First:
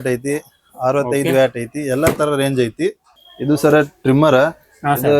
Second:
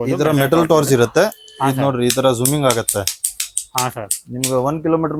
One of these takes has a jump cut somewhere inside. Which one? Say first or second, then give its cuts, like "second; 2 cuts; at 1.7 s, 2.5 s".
first; 1 cut; at 3.1 s